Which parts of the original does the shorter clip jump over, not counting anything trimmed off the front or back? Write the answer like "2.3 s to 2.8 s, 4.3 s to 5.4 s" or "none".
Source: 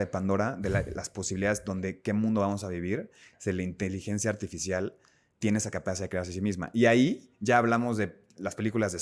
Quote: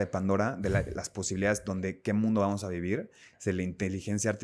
none